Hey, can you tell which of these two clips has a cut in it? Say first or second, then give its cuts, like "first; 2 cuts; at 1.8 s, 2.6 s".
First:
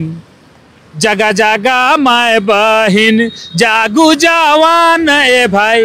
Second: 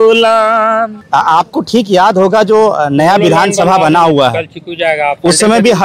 second; 1 cut; at 1.0 s